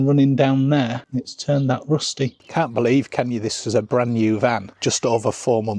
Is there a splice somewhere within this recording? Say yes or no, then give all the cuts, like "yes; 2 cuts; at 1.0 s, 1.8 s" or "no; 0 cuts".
yes; 1 cut; at 2.4 s